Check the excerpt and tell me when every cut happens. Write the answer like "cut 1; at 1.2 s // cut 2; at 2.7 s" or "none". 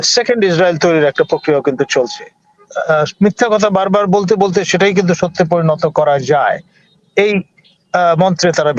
cut 1; at 2.6 s